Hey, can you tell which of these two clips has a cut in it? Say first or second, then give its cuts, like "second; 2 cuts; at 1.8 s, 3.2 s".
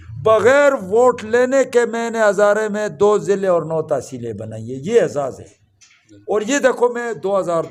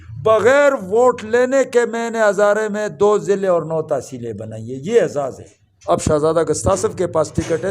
second; 1 cut; at 5.7 s